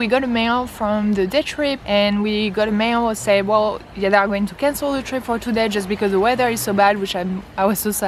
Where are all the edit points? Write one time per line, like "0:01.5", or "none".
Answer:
none

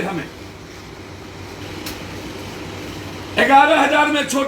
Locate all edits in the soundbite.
0:01.6

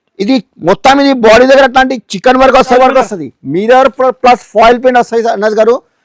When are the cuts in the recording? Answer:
0:02.7

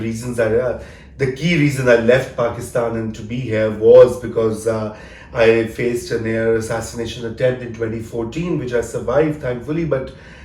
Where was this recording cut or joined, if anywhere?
none

